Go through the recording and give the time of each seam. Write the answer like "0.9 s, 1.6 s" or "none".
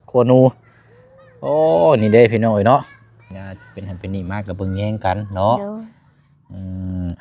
3.3 s